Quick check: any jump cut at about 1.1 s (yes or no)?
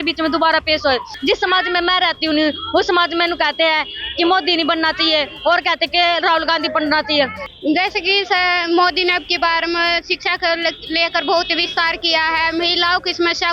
yes